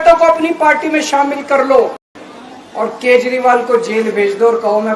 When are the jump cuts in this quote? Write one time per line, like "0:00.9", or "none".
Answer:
none